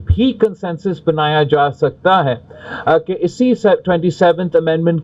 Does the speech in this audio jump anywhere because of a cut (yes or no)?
no